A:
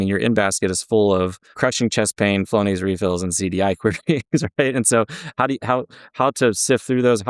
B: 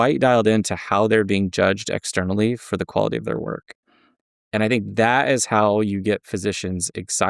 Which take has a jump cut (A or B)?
A